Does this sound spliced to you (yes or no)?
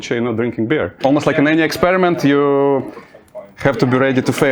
yes